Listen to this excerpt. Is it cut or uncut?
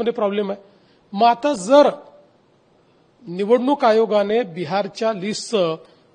uncut